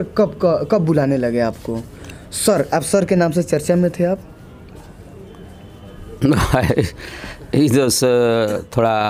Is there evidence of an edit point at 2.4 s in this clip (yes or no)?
no